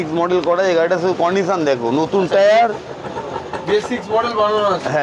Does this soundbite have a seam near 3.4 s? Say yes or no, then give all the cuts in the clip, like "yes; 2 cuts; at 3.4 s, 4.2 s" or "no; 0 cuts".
no; 0 cuts